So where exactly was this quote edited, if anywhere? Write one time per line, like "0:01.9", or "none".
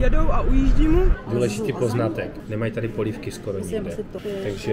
0:01.2
0:02.4

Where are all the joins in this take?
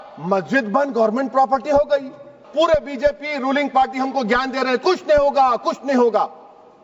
0:02.4

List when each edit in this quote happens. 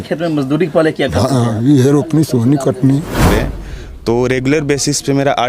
0:03.3

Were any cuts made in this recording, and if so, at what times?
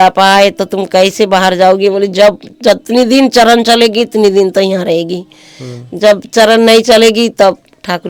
none

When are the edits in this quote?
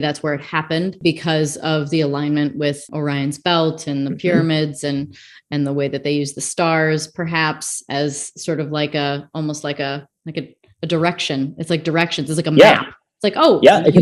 0:00.9
0:02.9

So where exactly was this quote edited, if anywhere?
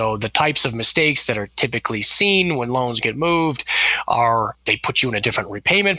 0:04.6

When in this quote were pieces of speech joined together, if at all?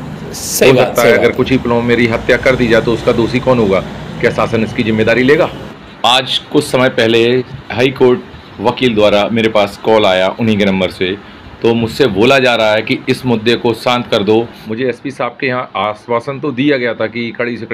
0:05.6
0:07.5
0:14.6

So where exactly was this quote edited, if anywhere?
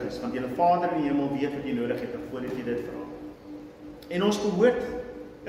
0:03.6

